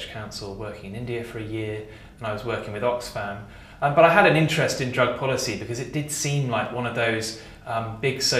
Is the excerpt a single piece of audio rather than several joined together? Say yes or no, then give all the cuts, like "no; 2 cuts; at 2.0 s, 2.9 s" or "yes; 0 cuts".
no; 1 cut; at 7.3 s